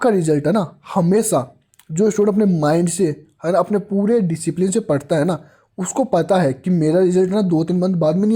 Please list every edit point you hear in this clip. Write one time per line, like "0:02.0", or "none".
none